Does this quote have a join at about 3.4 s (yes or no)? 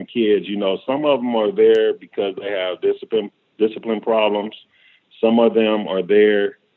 no